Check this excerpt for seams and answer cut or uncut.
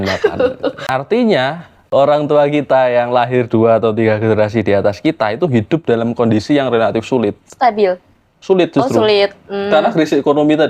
cut